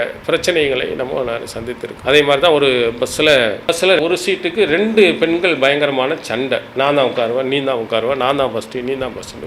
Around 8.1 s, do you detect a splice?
no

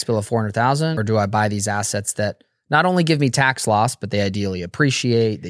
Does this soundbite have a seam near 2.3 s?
no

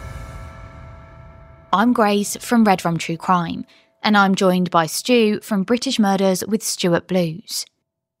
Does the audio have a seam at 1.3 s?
yes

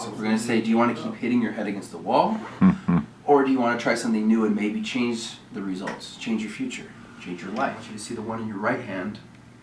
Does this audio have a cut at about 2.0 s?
no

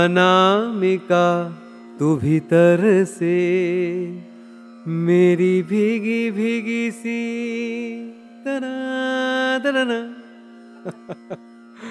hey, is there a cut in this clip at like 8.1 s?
no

